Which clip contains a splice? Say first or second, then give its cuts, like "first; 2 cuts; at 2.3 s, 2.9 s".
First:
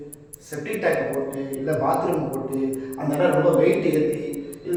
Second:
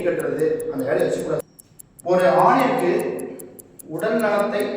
second; 1 cut; at 1.4 s